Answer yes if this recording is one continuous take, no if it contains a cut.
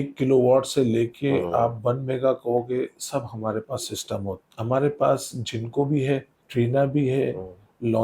no